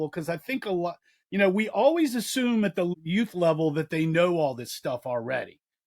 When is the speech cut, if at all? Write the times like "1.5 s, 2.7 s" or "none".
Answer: 2.9 s